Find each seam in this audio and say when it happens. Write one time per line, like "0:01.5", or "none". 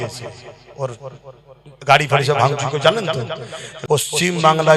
0:03.7